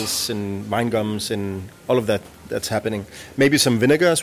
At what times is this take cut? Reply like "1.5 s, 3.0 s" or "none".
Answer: none